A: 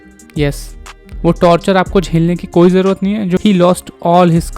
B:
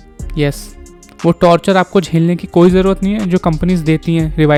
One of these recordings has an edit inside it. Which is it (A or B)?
A